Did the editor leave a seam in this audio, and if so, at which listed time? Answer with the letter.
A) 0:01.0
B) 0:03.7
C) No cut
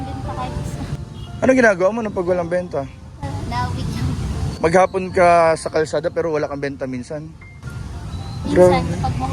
A